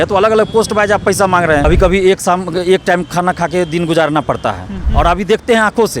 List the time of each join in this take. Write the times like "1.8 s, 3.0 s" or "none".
1.6 s, 4.8 s